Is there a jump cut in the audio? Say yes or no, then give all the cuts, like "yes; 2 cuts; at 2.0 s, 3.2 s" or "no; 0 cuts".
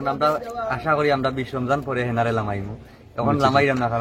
no; 0 cuts